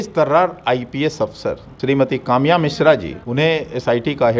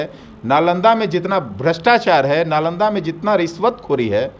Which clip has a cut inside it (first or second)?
first